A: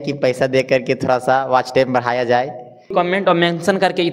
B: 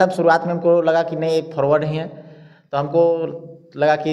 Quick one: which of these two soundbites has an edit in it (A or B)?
A